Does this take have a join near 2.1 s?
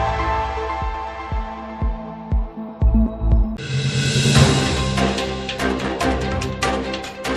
no; 1 cut; at 3.7 s

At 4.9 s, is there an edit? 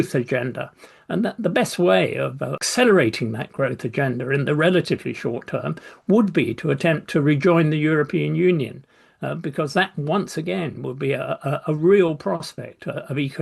no; 1 cut; at 2.6 s

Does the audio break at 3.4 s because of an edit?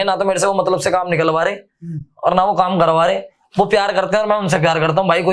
no; 0 cuts

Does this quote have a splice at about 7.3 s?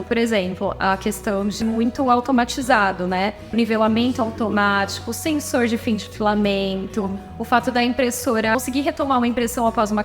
no; 3 cuts; at 1.6 s, 3.5 s, 8.6 s

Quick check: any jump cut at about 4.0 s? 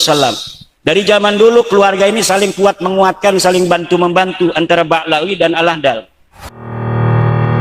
no; 1 cut; at 6.5 s

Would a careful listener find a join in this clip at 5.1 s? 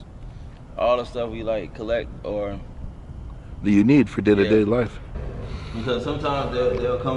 yes; 1 cut; at 5.1 s

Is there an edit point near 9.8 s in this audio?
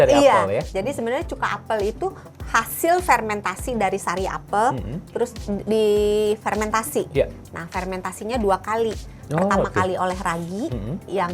no; 1 cut; at 5.0 s

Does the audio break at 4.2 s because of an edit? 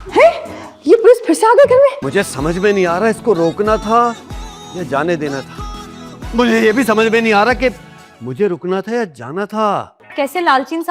no; 2 cuts; at 2.0 s, 10.0 s

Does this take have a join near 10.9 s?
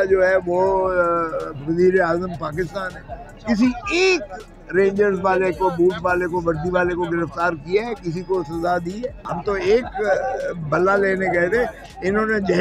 no; 2 cuts; at 3.3 s, 9.3 s

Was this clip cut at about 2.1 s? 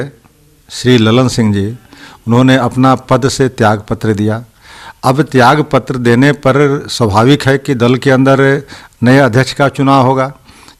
no; 0 cuts

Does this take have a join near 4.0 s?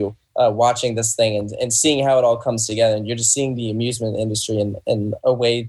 no; 0 cuts

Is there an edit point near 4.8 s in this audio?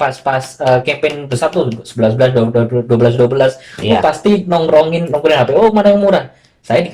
no; 0 cuts

